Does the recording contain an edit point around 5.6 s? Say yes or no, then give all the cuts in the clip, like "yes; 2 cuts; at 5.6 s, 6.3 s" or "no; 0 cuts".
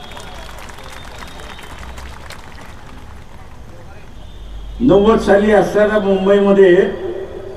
no; 1 cut; at 4.2 s